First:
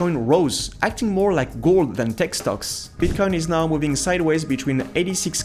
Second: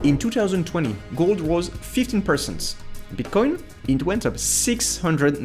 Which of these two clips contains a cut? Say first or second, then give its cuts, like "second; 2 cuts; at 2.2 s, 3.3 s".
first; 1 cut; at 2.9 s